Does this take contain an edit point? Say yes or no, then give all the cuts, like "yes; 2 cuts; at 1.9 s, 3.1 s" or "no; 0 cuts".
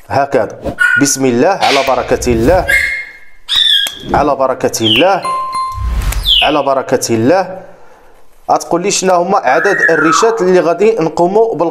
no; 0 cuts